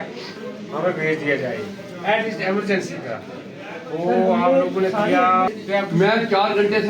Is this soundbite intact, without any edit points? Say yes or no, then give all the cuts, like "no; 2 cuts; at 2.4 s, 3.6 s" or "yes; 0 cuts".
no; 1 cut; at 5.6 s